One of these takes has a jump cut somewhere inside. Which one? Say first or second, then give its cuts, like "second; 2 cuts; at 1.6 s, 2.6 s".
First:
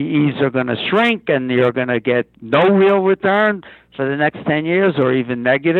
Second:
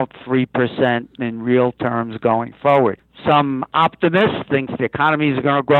second; 1 cut; at 3.1 s